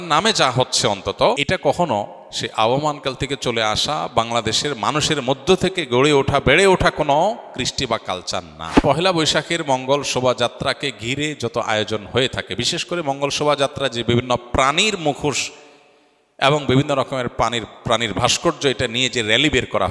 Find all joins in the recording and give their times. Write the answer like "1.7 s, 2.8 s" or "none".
1.4 s, 8.6 s